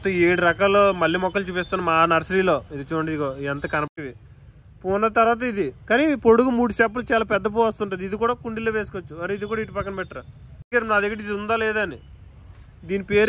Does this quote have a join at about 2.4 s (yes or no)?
no